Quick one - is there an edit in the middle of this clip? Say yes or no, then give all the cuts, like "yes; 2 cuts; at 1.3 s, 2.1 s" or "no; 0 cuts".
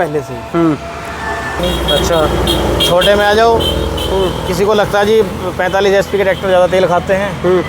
yes; 1 cut; at 1.6 s